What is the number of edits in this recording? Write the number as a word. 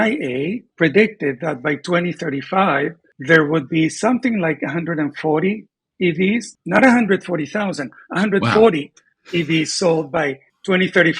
zero